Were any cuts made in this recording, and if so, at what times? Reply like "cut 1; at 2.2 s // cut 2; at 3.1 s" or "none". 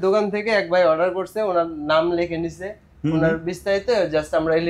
none